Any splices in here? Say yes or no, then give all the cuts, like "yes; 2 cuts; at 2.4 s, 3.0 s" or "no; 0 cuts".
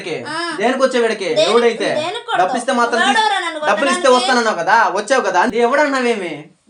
yes; 1 cut; at 5.5 s